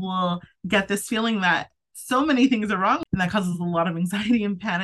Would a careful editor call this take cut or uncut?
cut